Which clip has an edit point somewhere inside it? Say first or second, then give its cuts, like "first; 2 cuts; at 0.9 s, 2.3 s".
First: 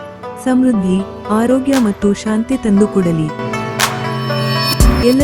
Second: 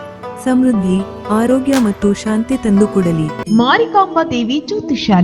second; 1 cut; at 3.4 s